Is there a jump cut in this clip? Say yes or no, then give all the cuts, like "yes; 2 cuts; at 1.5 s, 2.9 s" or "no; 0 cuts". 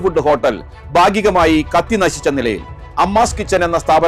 no; 0 cuts